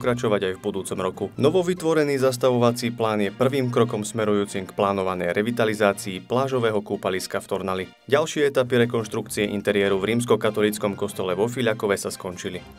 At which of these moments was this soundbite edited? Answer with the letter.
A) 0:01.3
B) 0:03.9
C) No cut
A